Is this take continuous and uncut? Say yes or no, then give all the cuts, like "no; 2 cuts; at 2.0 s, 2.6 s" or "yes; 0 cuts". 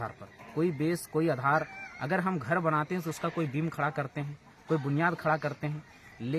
yes; 0 cuts